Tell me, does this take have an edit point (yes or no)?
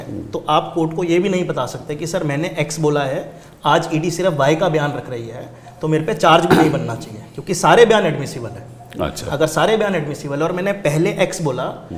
no